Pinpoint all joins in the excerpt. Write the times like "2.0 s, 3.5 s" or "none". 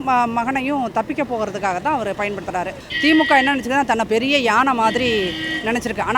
2.8 s